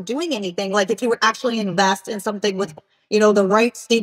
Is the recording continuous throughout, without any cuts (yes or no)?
yes